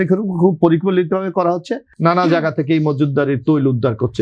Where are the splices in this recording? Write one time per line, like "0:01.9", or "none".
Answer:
0:01.8